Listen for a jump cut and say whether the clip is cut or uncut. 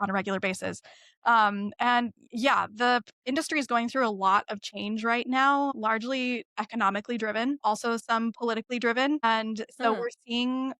cut